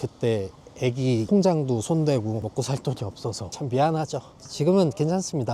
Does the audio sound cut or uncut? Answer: uncut